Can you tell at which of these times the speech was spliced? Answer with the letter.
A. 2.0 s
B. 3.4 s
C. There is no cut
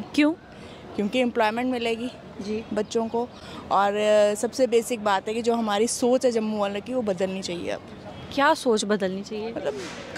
C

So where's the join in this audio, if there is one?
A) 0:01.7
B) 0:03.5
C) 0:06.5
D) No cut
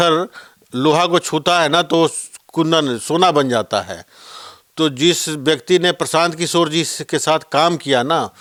D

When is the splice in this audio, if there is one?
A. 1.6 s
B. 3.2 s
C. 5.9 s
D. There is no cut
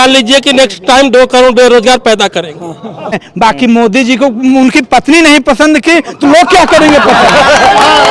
B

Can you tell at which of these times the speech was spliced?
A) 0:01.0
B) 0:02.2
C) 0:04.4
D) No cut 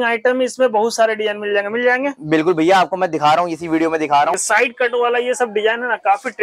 C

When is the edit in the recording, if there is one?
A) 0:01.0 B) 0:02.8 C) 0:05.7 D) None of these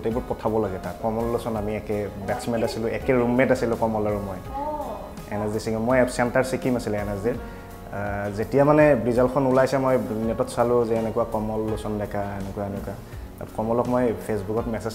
A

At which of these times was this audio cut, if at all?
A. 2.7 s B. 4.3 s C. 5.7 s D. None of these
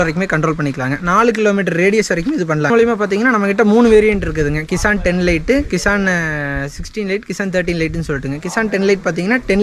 A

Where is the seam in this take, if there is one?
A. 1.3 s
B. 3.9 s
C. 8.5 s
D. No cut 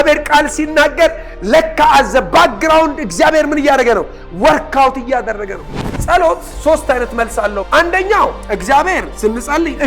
C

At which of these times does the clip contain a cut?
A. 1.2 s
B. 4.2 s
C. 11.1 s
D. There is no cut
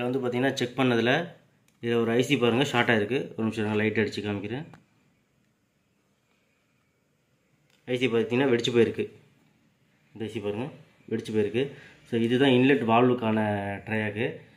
D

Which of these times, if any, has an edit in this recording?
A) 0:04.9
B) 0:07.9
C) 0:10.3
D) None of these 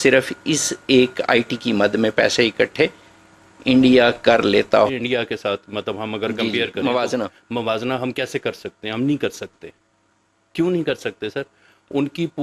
A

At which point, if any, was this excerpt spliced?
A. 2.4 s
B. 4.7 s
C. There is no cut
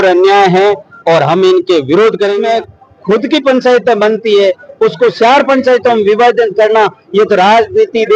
A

